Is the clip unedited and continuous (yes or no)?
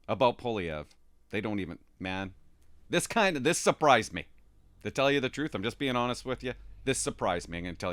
yes